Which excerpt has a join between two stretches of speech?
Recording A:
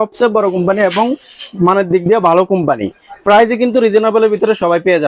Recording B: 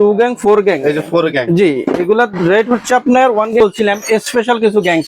B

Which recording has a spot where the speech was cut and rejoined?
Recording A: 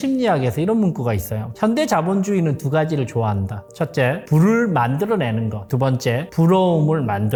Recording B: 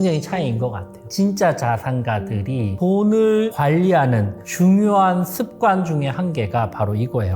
B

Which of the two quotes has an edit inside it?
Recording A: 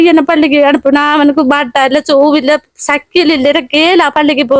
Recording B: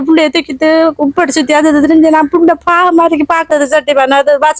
B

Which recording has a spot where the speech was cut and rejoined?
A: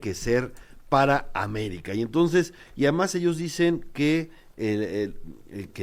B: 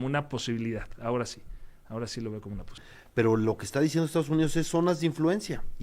B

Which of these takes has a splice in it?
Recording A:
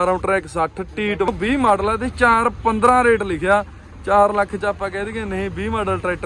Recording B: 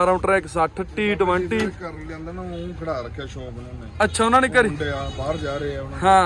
A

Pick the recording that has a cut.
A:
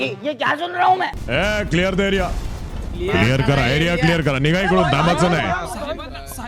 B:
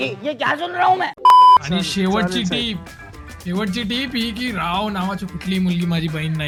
A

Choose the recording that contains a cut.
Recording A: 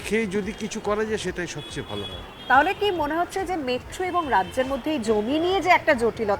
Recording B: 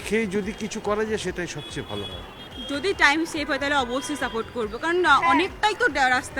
B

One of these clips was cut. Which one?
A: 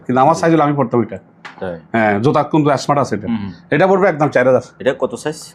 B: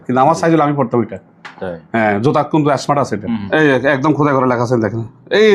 B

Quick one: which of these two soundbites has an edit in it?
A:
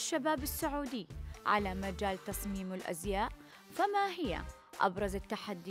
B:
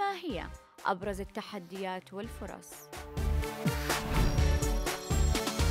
B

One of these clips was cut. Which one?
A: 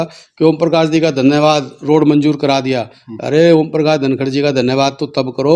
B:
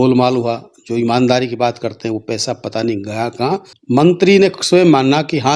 B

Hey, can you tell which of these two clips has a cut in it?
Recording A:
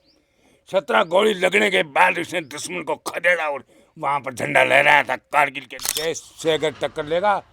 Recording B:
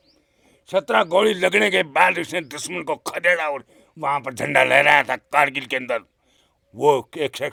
A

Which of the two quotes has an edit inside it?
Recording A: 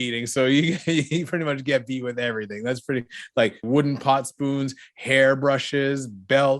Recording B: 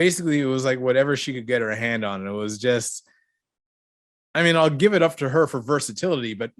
A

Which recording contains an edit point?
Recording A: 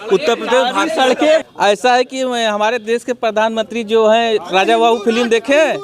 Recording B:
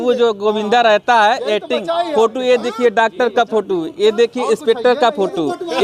A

